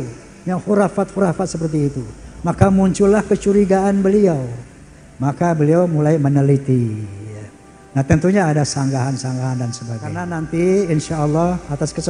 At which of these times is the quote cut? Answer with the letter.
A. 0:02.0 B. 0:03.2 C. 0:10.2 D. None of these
C